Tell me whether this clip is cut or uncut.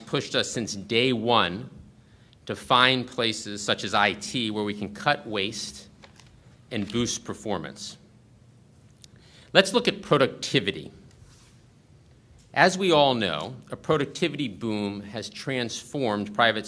uncut